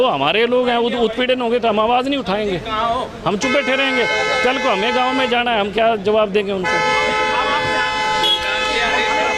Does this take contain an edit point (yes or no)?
no